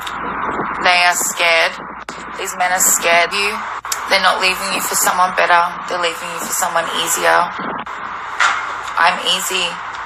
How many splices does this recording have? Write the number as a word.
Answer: one